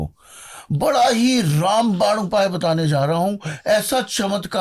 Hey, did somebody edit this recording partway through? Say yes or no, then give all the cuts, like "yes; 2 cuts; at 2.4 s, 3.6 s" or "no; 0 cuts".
no; 0 cuts